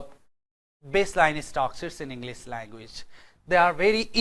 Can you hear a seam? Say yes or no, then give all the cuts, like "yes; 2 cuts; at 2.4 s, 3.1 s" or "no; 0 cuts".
no; 0 cuts